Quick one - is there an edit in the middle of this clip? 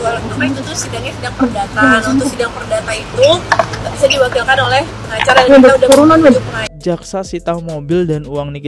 yes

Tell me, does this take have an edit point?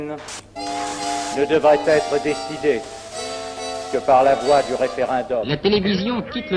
yes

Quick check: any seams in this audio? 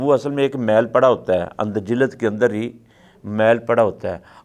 no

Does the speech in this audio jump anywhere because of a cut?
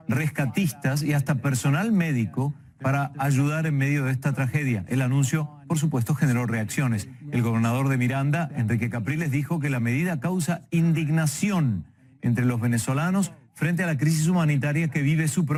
no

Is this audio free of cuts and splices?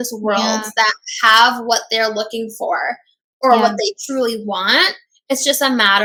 yes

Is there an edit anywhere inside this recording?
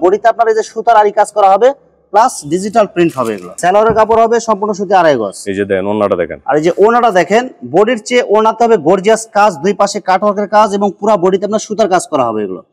no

